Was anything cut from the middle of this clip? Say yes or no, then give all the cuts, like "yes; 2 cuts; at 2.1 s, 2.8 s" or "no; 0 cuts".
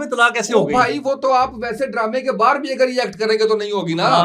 no; 0 cuts